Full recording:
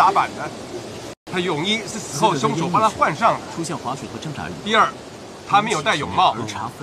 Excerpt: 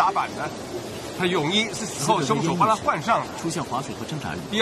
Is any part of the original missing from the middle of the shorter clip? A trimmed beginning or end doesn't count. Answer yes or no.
yes